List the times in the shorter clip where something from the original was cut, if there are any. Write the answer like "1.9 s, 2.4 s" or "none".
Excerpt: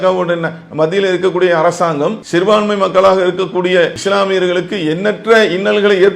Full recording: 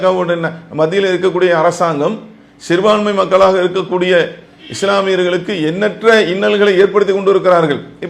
2.2 s, 4.0 s